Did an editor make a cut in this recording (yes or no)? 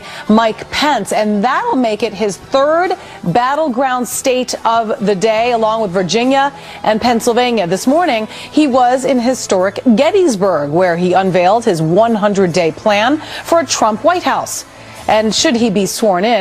yes